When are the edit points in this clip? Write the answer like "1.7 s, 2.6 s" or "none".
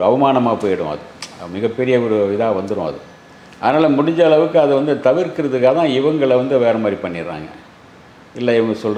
none